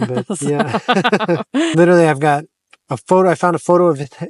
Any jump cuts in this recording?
yes; 1 cut; at 1.7 s

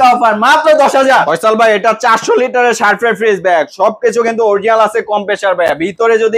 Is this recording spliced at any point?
yes; 1 cut; at 1.1 s

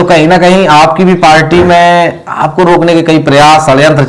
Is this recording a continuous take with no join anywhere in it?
yes; 0 cuts

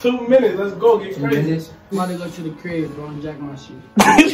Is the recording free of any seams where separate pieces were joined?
no; 1 cut; at 1.9 s

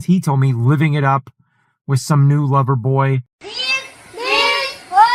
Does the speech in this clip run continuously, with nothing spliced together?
no; 1 cut; at 3.3 s

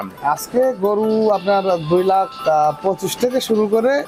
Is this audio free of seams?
yes; 0 cuts

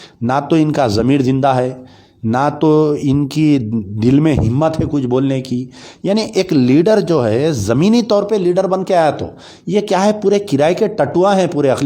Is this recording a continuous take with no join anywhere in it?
yes; 0 cuts

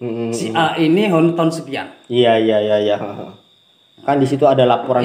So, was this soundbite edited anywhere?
no; 0 cuts

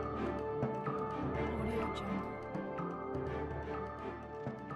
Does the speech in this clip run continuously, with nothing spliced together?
no; 1 cut; at 2.9 s

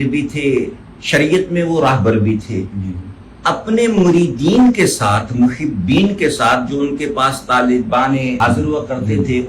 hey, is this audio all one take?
no; 1 cut; at 8.4 s

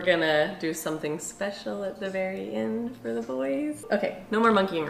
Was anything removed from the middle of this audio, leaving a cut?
yes; 1 cut; at 3.8 s

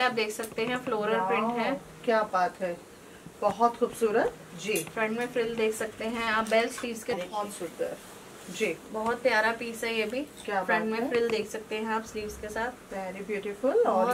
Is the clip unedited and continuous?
no; 1 cut; at 7.1 s

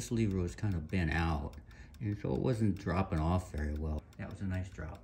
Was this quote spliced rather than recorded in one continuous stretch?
yes; 1 cut; at 4.0 s

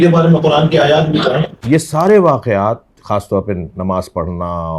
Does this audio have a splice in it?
yes; 1 cut; at 1.5 s

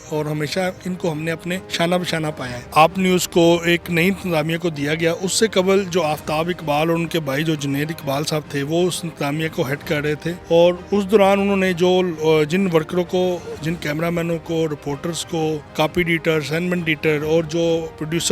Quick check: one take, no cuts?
no; 4 cuts; at 1.7 s, 2.7 s, 10.4 s, 15.7 s

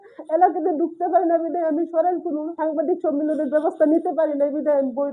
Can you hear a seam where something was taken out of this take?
yes; 1 cut; at 2.5 s

